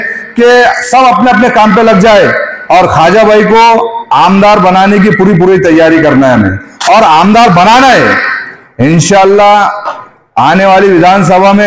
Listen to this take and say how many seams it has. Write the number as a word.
zero